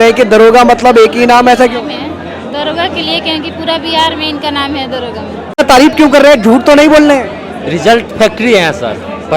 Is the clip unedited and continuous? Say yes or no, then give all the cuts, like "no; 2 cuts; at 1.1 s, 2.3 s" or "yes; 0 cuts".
no; 1 cut; at 5.6 s